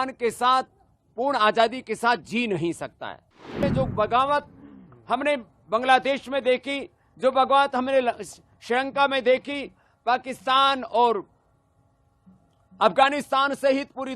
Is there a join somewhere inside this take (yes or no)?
yes